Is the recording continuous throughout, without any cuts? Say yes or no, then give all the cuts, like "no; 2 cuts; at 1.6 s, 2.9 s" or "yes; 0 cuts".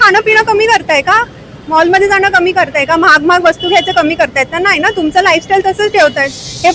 yes; 0 cuts